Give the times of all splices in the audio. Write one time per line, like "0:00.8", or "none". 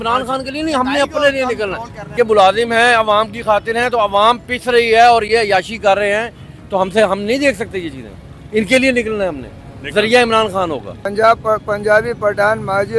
0:02.1
0:11.0

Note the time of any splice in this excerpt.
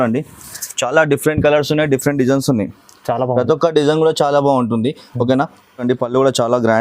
0:05.8

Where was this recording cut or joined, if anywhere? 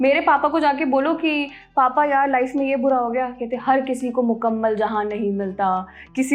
none

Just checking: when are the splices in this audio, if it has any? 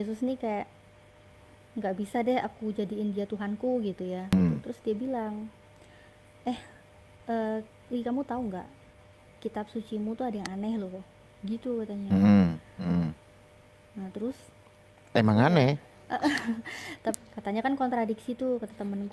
0:04.3
0:17.2

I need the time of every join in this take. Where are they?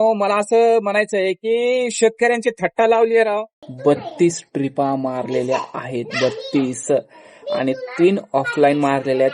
0:03.6

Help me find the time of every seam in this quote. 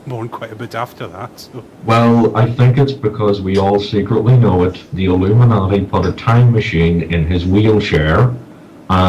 0:05.3

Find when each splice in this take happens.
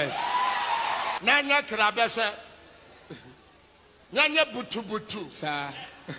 0:01.2

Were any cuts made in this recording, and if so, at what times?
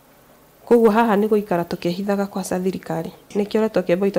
0:03.3

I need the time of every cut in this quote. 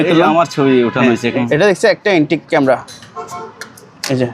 0:01.3

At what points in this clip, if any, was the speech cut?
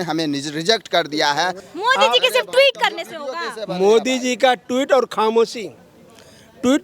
0:01.6

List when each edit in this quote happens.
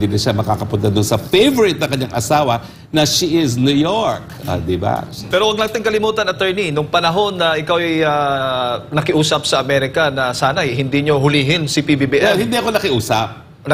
0:05.2

